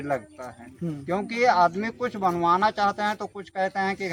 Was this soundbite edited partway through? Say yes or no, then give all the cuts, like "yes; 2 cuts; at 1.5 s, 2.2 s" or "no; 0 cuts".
no; 0 cuts